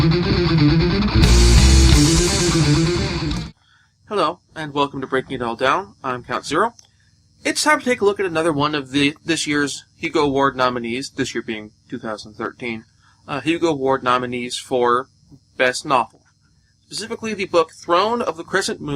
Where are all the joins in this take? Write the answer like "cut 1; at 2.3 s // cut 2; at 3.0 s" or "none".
cut 1; at 9.5 s